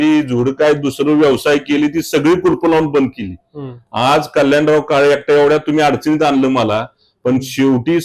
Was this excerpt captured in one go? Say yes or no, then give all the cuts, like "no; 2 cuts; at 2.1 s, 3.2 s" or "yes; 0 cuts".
yes; 0 cuts